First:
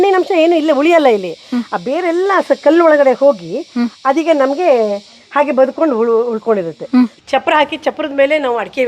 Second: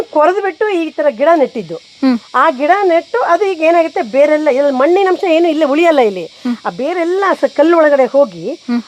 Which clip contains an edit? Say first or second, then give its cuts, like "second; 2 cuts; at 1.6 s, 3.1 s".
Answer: first; 1 cut; at 7.1 s